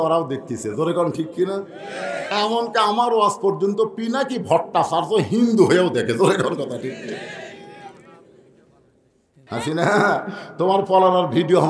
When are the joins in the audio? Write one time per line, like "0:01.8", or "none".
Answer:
0:09.4